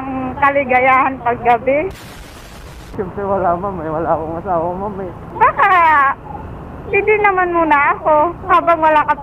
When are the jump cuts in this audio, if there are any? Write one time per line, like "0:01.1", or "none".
0:02.9
0:05.2